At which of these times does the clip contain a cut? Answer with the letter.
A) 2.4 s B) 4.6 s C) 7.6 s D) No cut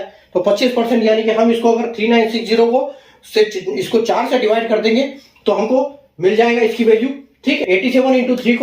C